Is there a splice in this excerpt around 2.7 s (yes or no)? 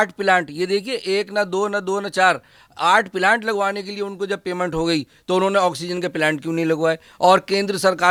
no